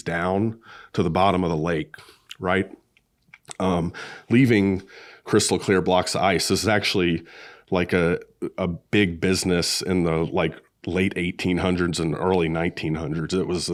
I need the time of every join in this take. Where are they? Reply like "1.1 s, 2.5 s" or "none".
none